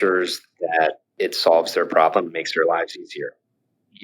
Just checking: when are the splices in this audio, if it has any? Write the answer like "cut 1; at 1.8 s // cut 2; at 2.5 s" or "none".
cut 1; at 1.1 s